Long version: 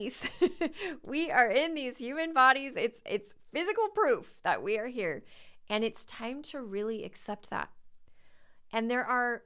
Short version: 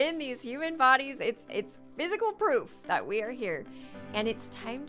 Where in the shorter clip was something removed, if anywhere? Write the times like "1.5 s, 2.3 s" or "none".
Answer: none